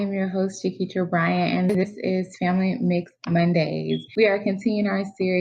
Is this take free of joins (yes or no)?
no